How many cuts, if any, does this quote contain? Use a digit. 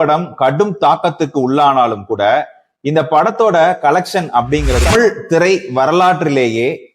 1